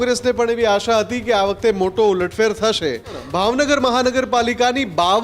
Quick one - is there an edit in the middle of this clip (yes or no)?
yes